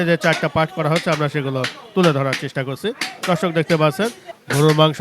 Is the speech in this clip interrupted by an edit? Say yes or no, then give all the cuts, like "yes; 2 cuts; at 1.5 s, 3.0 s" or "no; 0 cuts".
no; 0 cuts